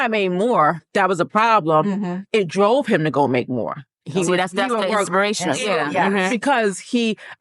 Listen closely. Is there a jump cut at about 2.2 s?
yes; 2 cuts; at 0.9 s, 2.2 s

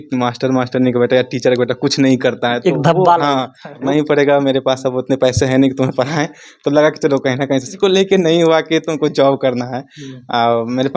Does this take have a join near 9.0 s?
no; 2 cuts; at 3.8 s, 7.8 s

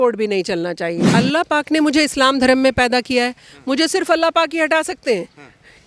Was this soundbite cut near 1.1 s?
yes; 1 cut; at 1.1 s

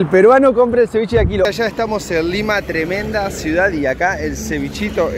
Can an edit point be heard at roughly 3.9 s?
no; 1 cut; at 1.5 s

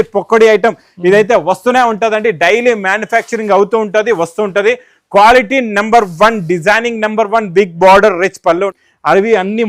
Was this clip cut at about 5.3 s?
no; 1 cut; at 8.7 s

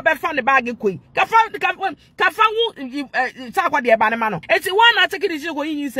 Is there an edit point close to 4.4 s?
yes; 1 cut; at 4.4 s

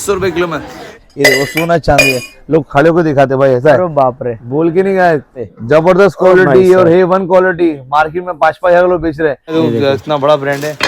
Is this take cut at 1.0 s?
yes; 3 cuts; at 1.0 s, 5.4 s, 9.4 s

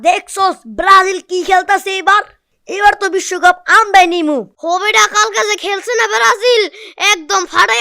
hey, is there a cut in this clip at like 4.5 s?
no; 0 cuts

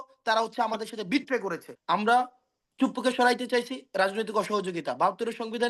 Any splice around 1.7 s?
yes; 1 cut; at 1.7 s

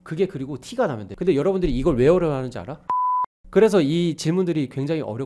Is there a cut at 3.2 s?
yes; 2 cuts; at 1.1 s, 3.2 s

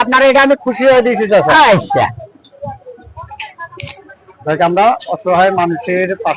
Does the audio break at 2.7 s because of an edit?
yes; 1 cut; at 2.7 s

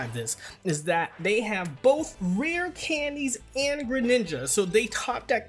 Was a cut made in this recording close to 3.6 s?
no; 1 cut; at 2.1 s

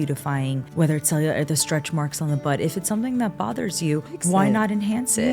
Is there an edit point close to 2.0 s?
no; 0 cuts

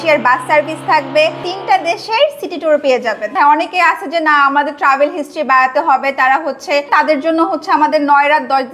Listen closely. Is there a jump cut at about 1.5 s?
yes; 3 cuts; at 1.5 s, 3.3 s, 6.9 s

